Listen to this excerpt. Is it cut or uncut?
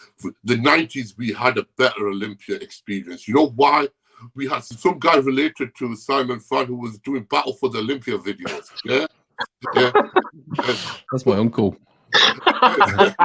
cut